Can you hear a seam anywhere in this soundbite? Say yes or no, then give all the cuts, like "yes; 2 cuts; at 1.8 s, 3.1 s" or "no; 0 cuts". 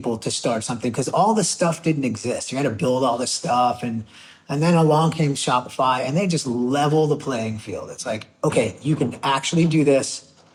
no; 0 cuts